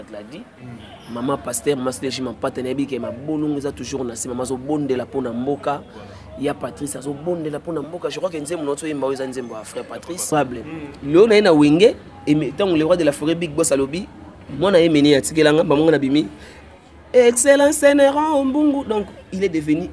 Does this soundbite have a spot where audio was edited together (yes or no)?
yes